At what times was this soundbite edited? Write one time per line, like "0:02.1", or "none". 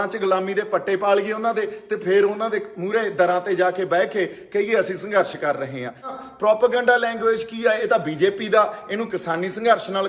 0:06.2